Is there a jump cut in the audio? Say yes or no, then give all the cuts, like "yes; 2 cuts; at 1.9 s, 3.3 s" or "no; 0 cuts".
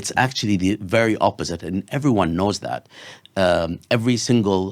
no; 0 cuts